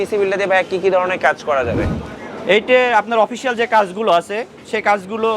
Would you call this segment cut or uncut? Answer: uncut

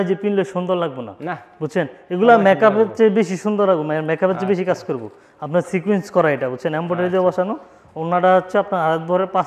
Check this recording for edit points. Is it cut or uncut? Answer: uncut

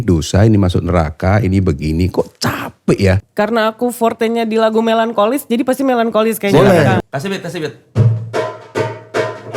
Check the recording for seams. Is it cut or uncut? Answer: cut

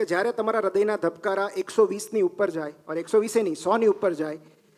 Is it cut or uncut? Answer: uncut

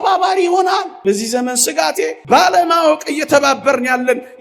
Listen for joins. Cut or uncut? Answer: cut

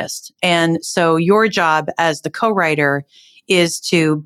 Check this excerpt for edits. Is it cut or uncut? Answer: uncut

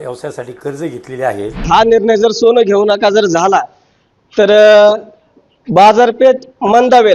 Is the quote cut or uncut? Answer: cut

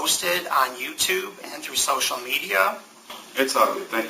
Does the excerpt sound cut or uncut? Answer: cut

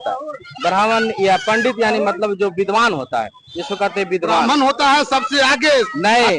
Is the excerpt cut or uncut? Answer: uncut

